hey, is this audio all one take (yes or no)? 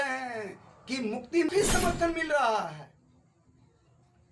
no